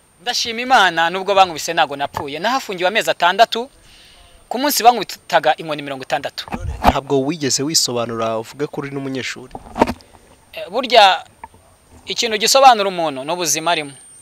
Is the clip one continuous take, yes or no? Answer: yes